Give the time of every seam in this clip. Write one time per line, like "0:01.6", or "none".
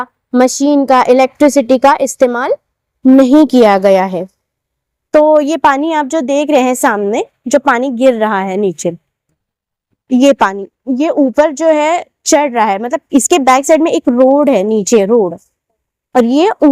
none